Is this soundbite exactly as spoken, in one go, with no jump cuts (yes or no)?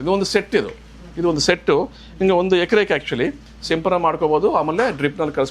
yes